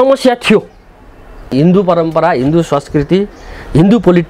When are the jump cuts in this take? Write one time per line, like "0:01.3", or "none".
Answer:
0:01.5